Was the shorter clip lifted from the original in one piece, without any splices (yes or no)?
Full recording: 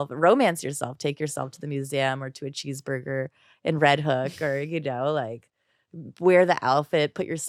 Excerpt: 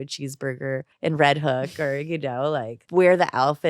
no